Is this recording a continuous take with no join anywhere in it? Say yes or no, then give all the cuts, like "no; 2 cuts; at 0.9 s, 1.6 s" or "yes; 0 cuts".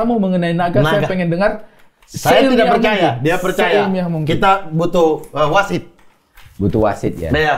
yes; 0 cuts